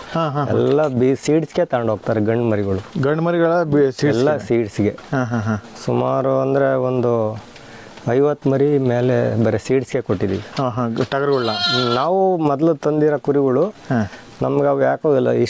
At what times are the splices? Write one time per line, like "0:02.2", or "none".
none